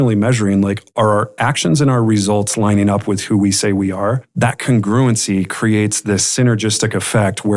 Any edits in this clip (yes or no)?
yes